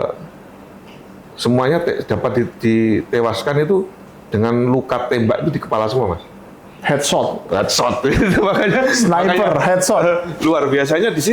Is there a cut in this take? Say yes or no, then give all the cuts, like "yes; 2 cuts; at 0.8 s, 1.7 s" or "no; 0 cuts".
no; 0 cuts